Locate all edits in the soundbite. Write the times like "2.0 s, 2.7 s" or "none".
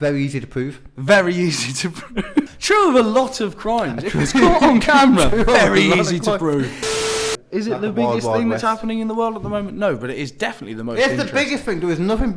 2.6 s, 6.9 s